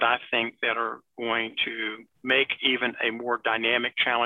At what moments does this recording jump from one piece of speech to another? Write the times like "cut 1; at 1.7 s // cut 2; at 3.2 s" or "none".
cut 1; at 2.1 s